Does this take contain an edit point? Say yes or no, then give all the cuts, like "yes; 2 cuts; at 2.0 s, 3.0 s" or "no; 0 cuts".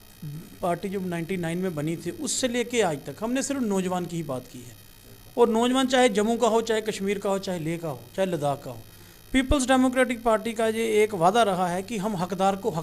no; 0 cuts